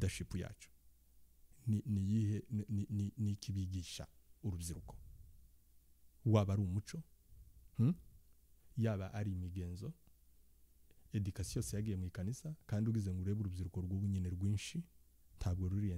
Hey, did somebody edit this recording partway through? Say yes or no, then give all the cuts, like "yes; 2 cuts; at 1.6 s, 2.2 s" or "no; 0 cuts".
no; 0 cuts